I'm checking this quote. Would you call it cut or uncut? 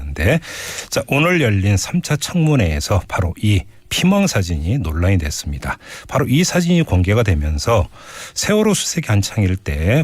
cut